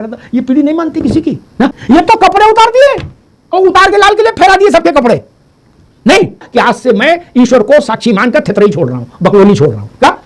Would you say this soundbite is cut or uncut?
cut